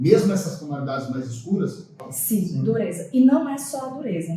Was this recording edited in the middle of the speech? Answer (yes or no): yes